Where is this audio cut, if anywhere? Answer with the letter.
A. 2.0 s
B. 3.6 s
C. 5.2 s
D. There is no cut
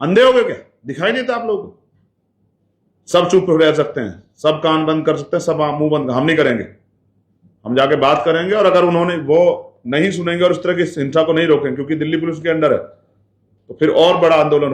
D